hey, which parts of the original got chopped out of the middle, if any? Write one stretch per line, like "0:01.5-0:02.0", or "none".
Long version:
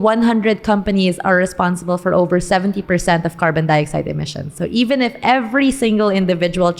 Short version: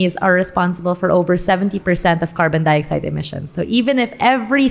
none